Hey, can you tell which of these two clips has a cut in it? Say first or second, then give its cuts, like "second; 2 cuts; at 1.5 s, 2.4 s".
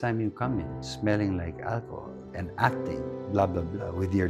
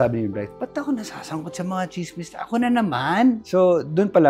second; 1 cut; at 3.4 s